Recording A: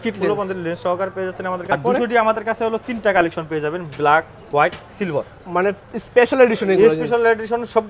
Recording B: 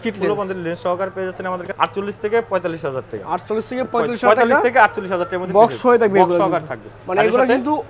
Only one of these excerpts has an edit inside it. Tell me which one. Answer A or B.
A